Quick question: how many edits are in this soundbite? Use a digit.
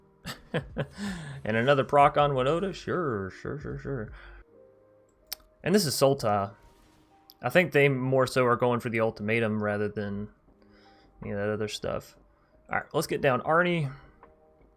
1